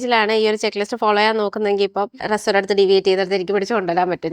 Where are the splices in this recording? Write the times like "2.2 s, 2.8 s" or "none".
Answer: 2.2 s